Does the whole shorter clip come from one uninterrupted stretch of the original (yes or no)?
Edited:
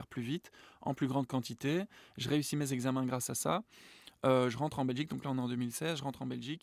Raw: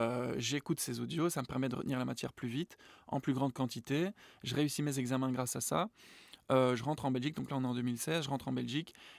yes